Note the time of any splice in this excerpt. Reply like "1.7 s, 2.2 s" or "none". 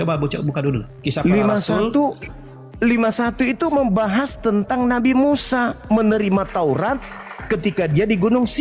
none